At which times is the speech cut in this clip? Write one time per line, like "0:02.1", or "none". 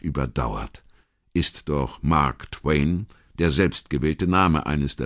0:03.8